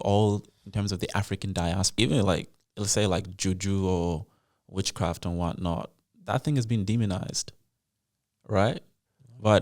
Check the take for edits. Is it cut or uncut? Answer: cut